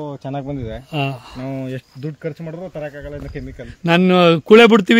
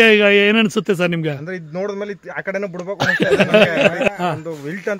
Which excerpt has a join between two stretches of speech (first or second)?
second